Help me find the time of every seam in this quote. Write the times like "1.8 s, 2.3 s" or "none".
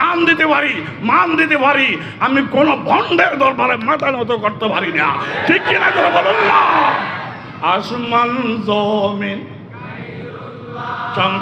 none